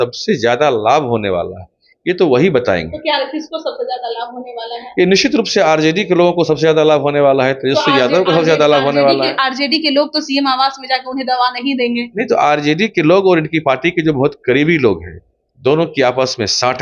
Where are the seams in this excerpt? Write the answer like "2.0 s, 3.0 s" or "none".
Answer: none